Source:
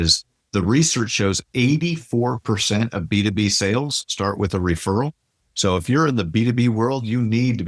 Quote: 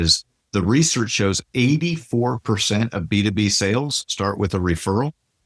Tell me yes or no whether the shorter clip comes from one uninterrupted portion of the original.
yes